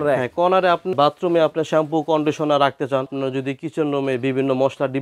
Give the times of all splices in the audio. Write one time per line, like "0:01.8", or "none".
0:00.9
0:03.1

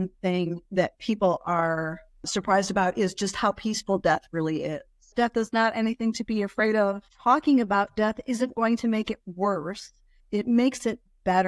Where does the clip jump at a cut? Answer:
0:02.3
0:05.1
0:07.0
0:10.2

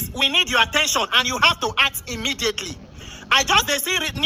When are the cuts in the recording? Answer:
none

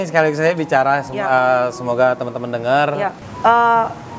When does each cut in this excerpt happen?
0:03.2

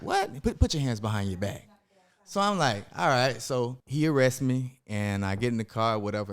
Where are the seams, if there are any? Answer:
0:03.8

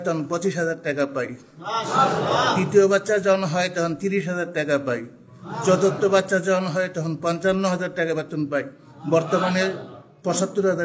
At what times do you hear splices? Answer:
none

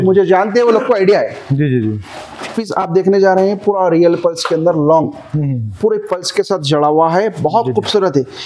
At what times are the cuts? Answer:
none

